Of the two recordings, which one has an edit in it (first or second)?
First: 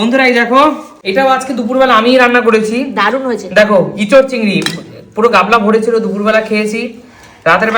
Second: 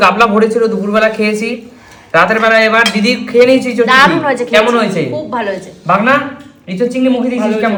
first